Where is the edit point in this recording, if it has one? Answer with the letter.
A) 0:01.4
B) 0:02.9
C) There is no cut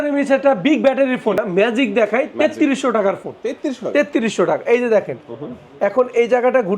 A